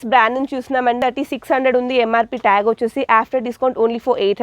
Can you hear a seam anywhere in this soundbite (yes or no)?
yes